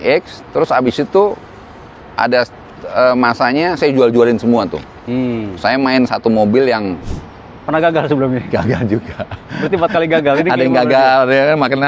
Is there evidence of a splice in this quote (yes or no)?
yes